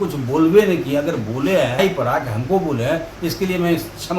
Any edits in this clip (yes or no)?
yes